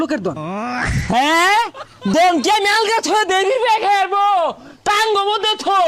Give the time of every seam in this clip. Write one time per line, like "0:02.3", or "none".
none